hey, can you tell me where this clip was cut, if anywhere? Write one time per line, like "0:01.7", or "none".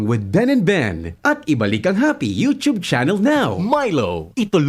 0:03.5